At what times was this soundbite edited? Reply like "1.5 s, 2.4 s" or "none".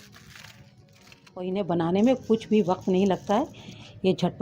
1.5 s